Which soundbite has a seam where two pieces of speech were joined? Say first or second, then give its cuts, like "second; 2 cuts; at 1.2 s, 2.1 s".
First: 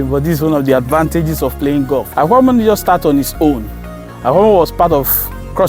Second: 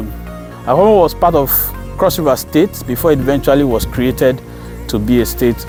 first; 1 cut; at 2.1 s